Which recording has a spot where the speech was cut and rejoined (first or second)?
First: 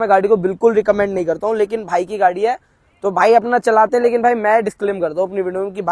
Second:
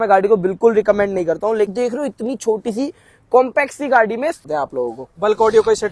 second